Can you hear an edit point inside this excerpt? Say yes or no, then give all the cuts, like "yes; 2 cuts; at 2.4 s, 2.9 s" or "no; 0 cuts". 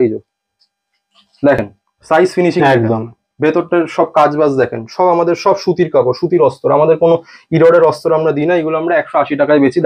no; 0 cuts